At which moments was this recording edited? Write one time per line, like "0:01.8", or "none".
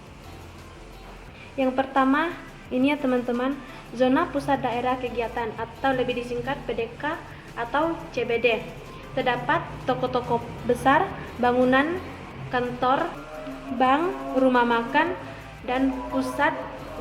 0:13.3